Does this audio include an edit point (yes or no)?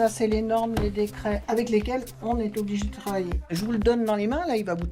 yes